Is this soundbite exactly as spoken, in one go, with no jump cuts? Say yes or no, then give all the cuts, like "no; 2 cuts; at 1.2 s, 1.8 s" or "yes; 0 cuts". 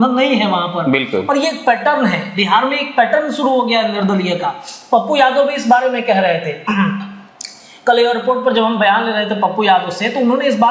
yes; 0 cuts